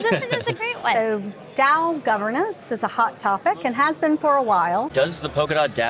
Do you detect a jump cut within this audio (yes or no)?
yes